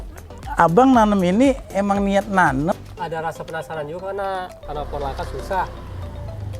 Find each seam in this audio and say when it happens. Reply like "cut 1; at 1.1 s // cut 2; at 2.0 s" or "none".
cut 1; at 2.7 s // cut 2; at 4.6 s